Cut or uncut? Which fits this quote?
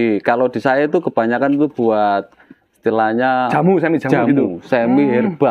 uncut